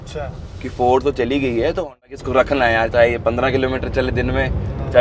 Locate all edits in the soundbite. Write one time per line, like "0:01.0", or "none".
0:02.2